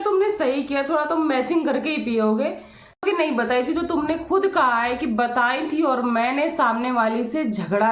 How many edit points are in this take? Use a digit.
1